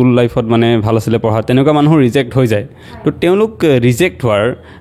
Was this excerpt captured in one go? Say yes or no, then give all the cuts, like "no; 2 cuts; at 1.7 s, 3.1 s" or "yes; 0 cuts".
yes; 0 cuts